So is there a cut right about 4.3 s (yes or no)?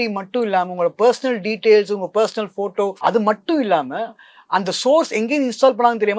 no